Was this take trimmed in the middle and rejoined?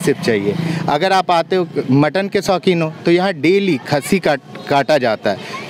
no; 0 cuts

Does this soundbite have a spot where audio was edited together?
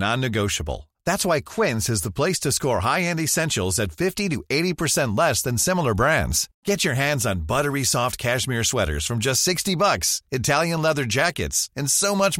no; 0 cuts

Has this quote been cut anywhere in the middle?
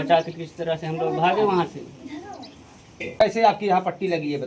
yes; 1 cut; at 3.3 s

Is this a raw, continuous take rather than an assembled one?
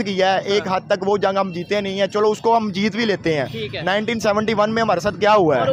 yes; 0 cuts

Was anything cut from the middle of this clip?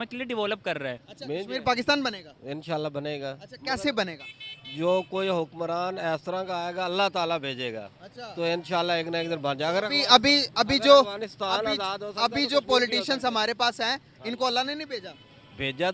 yes; 1 cut; at 1.1 s

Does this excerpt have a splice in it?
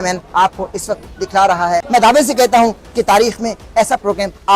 yes; 1 cut; at 1.8 s

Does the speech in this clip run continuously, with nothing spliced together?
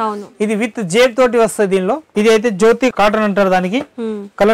no; 1 cut; at 2.0 s

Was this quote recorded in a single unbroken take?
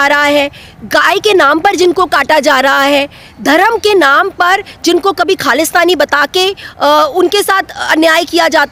yes; 0 cuts

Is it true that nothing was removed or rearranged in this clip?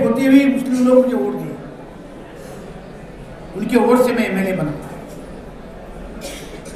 yes; 0 cuts

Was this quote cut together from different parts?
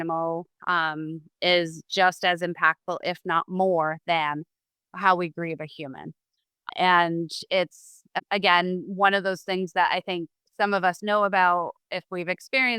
yes; 2 cuts; at 6.7 s, 8.0 s

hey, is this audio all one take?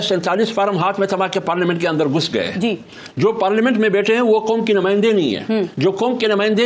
yes; 0 cuts

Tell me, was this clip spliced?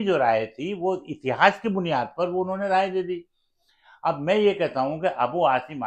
no; 0 cuts

